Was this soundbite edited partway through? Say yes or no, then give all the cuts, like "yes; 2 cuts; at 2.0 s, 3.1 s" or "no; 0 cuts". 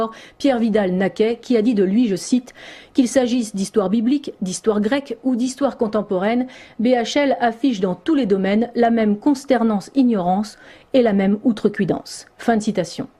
yes; 1 cut; at 9.2 s